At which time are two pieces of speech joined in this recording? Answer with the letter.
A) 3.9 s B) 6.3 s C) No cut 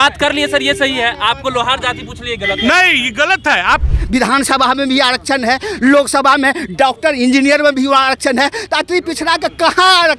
A